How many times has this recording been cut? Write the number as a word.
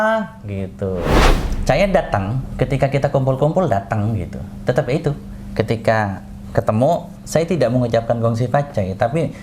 one